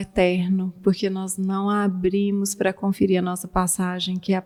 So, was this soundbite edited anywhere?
no; 0 cuts

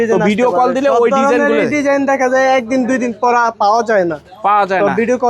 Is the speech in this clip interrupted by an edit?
no; 0 cuts

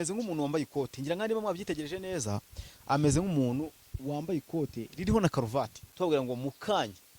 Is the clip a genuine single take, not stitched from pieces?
no; 1 cut; at 5.8 s

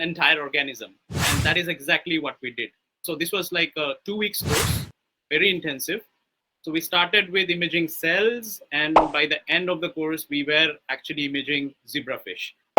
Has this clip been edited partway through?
yes; 1 cut; at 3.0 s

